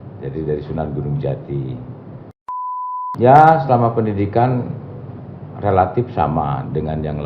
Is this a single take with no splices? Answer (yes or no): no